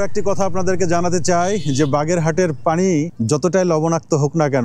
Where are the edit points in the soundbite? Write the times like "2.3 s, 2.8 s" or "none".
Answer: 3.1 s